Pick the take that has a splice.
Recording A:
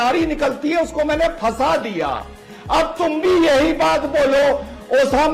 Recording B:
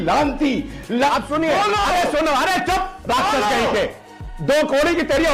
B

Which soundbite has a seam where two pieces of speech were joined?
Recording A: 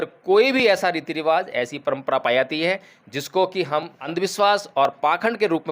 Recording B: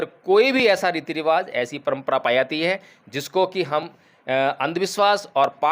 A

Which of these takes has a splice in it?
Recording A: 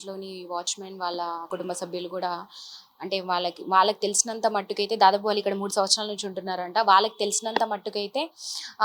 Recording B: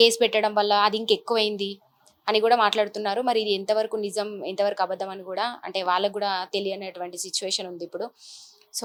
A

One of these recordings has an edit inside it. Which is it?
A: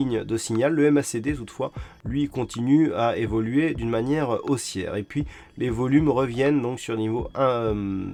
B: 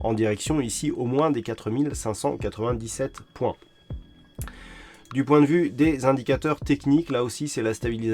B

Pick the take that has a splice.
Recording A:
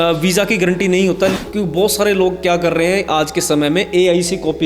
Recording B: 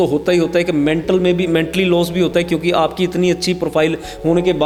A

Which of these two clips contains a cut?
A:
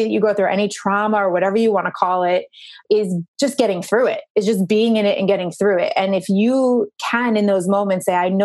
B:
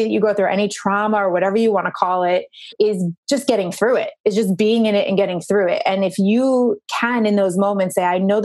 B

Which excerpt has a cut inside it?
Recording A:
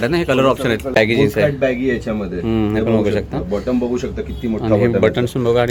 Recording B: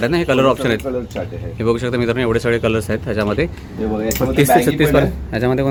A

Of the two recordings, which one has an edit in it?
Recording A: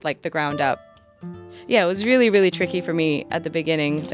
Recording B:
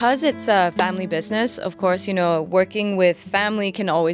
A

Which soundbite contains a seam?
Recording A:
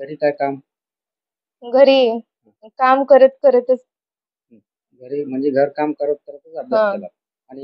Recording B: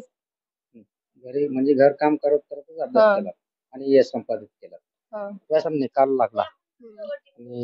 B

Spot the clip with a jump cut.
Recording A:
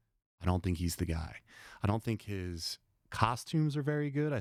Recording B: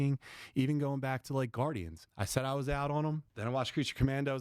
B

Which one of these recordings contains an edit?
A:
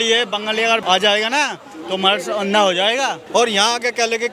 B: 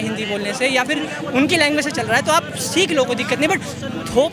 A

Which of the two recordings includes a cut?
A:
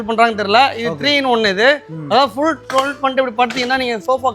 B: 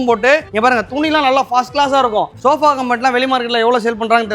B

